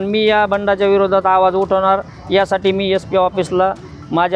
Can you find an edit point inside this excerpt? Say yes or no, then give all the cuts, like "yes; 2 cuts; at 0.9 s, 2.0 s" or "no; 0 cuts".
no; 0 cuts